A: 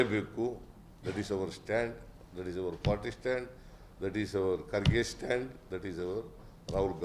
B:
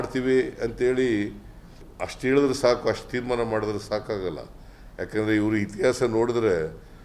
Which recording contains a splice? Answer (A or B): B